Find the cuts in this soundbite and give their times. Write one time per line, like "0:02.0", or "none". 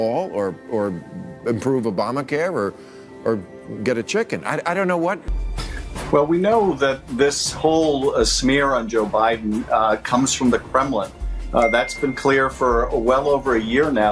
0:05.2